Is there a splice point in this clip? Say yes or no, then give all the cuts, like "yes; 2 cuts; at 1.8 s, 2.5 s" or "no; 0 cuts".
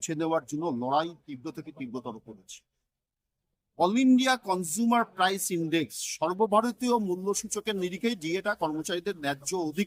no; 0 cuts